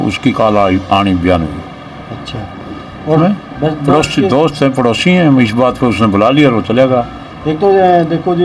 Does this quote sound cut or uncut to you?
cut